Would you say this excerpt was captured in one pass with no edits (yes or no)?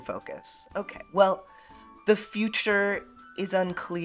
yes